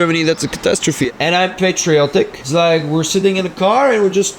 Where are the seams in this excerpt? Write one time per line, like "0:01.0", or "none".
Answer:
0:01.1
0:02.4